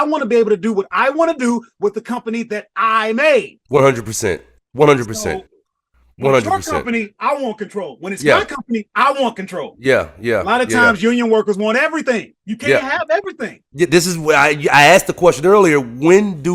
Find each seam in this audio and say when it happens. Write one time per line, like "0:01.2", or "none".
none